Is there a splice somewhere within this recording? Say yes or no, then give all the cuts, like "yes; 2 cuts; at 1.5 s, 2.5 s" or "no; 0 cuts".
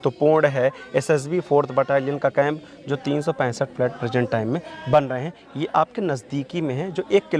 no; 0 cuts